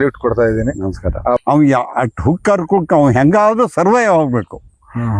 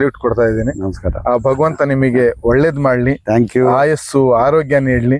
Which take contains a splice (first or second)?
first